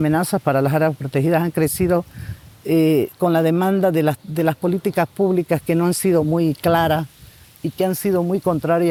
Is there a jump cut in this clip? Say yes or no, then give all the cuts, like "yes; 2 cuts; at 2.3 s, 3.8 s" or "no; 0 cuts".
no; 0 cuts